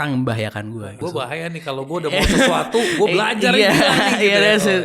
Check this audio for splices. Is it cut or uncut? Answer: cut